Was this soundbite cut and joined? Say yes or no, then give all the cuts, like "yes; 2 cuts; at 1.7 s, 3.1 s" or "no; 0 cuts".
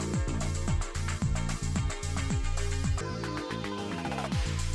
no; 0 cuts